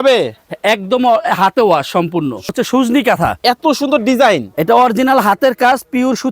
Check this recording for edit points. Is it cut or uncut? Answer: cut